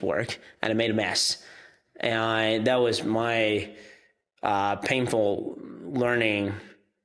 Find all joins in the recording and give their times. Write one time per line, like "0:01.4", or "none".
none